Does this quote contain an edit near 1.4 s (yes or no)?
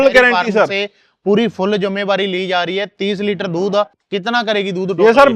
no